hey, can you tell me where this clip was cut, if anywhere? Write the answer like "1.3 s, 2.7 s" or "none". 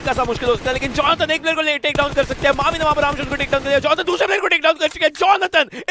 none